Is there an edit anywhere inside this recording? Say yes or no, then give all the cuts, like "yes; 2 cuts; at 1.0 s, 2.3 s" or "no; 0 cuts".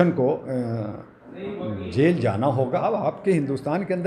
yes; 1 cut; at 2.8 s